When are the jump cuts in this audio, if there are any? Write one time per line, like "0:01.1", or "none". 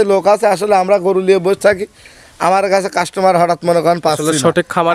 none